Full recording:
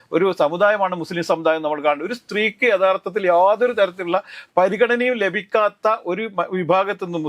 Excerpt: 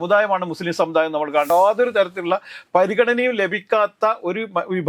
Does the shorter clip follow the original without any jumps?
no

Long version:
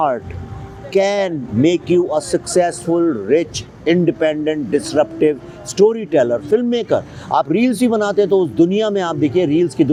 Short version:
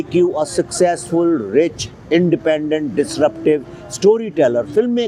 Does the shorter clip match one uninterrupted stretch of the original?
yes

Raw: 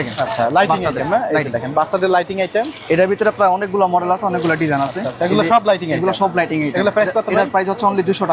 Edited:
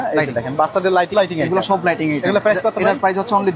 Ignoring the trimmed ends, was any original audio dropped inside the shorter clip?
yes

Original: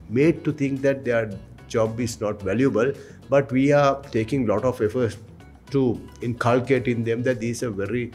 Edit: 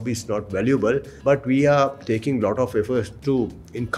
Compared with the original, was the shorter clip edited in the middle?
yes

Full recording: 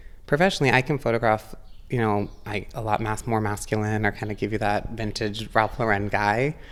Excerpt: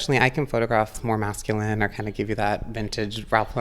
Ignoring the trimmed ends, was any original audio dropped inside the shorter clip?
yes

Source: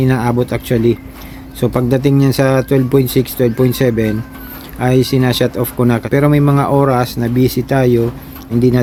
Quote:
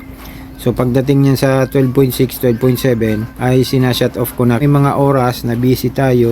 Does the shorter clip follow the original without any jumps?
no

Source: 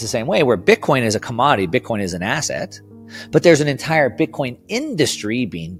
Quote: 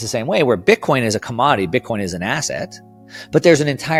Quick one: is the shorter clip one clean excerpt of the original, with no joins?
yes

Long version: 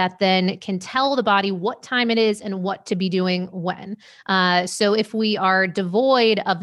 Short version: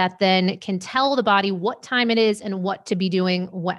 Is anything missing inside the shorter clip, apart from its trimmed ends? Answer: no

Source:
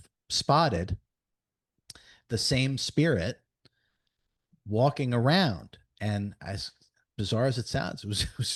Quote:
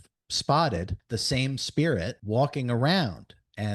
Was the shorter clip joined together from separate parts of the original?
yes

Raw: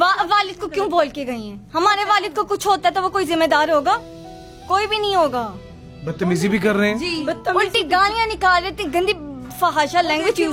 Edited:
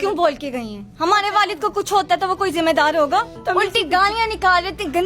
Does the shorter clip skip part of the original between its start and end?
yes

